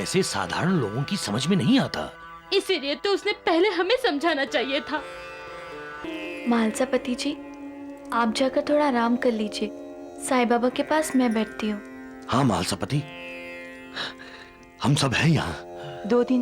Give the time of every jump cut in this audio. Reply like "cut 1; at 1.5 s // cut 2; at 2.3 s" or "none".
cut 1; at 6.1 s